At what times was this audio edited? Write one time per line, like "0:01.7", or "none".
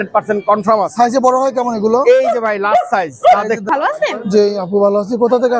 0:03.7